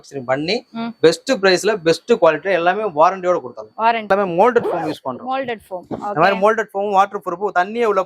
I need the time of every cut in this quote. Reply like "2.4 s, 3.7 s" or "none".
4.1 s